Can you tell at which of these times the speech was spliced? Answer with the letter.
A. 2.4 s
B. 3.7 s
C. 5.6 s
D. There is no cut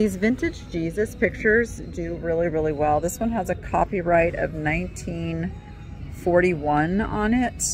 D